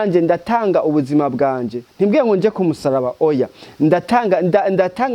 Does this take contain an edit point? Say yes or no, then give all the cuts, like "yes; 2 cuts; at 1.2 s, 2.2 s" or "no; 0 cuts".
no; 0 cuts